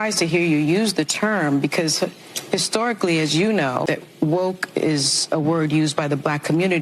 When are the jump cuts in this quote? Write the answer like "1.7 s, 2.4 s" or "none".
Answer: 3.8 s